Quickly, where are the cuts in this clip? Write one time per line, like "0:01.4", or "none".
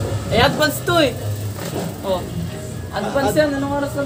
none